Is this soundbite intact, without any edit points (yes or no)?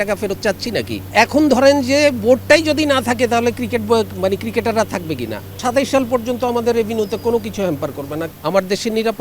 no